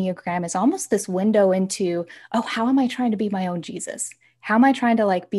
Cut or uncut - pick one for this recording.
uncut